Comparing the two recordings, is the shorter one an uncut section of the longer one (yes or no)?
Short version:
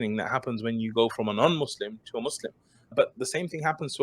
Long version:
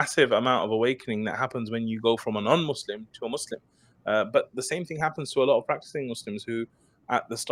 no